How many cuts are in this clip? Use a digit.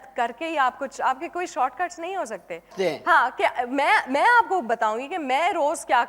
1